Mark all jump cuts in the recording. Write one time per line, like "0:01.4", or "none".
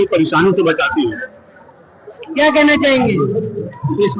none